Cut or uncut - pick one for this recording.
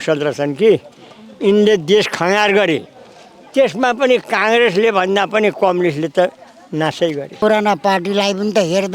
cut